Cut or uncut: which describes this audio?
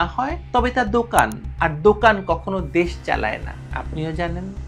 uncut